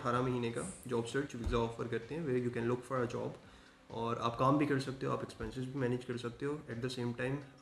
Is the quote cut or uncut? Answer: uncut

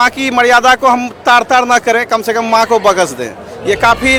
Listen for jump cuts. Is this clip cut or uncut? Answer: uncut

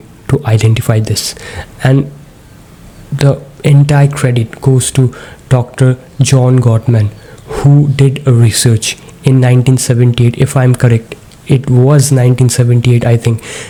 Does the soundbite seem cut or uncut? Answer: uncut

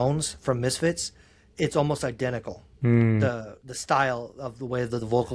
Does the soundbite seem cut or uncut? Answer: uncut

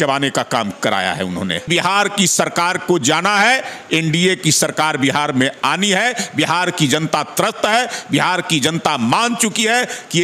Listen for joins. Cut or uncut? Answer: cut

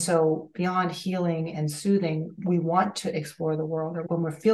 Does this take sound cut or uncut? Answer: cut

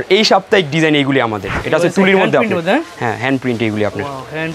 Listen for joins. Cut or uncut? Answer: cut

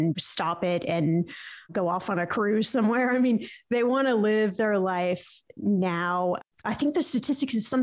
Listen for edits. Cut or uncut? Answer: cut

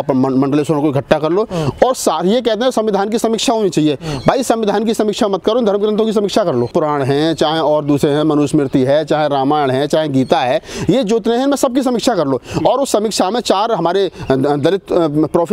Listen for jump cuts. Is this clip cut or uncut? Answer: uncut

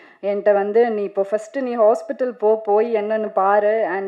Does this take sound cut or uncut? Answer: uncut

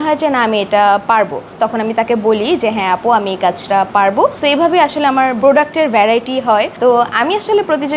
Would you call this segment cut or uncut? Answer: cut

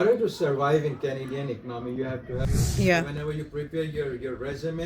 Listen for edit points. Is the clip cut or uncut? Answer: cut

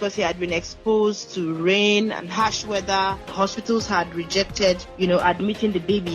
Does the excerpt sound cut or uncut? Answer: cut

